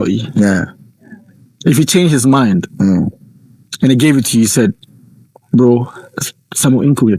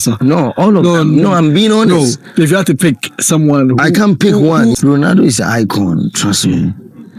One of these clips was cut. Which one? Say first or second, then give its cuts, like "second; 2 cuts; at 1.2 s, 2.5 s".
second; 1 cut; at 4.7 s